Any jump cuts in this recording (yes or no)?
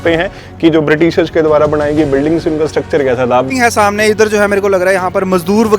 yes